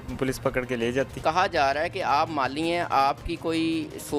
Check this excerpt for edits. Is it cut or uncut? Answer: cut